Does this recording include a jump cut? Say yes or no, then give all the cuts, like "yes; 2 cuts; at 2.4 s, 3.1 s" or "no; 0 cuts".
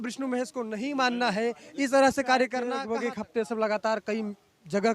yes; 1 cut; at 2.8 s